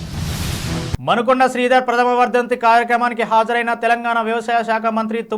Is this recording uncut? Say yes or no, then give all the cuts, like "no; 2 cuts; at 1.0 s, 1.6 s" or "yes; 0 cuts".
no; 1 cut; at 1.0 s